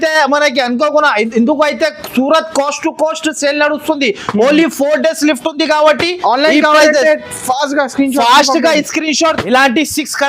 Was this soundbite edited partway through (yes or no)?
yes